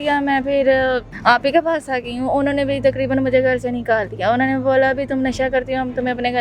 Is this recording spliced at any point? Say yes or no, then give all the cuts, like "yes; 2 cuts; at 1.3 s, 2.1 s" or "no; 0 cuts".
yes; 1 cut; at 1.1 s